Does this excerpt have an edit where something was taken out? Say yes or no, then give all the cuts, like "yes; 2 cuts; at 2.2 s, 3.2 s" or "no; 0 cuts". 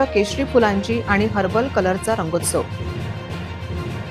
no; 0 cuts